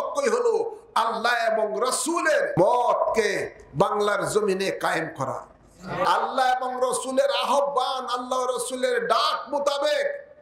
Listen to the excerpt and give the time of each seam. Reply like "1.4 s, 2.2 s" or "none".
2.6 s, 6.1 s